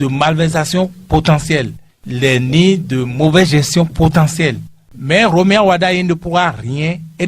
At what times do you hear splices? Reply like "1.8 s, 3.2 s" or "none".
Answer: 4.9 s

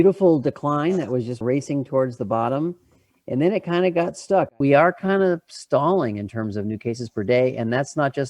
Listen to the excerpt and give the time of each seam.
4.6 s

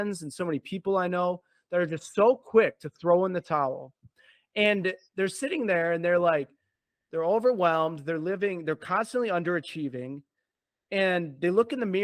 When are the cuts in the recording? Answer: none

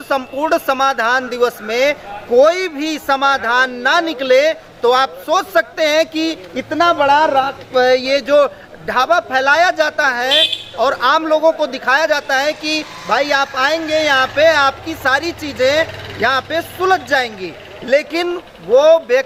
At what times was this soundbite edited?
none

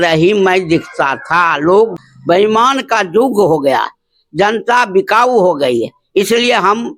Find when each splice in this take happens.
1.9 s

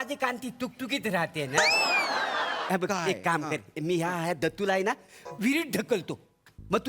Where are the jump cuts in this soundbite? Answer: 2.6 s

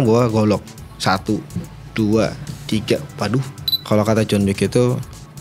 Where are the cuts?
3.7 s

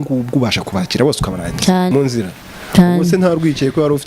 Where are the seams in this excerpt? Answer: 1.9 s

